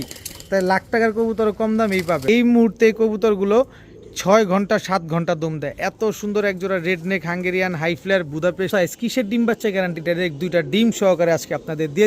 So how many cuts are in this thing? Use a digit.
2